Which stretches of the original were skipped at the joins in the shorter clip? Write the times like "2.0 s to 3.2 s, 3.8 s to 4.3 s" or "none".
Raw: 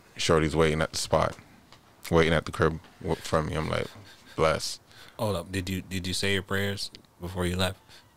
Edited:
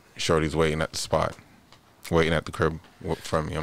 none